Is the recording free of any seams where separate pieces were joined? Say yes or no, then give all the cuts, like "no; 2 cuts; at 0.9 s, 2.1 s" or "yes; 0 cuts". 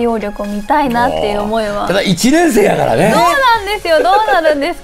yes; 0 cuts